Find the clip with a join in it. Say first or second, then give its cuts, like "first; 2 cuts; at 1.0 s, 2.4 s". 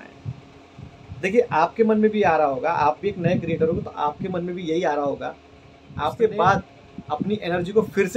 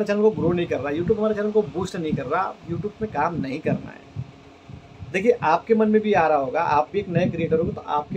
first; 1 cut; at 6.1 s